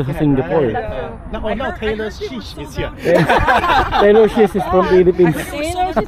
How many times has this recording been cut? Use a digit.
0